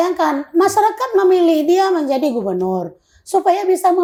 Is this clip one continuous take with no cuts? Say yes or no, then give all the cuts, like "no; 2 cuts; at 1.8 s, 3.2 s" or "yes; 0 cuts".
yes; 0 cuts